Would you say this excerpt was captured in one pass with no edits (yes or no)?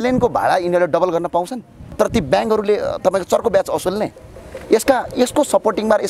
no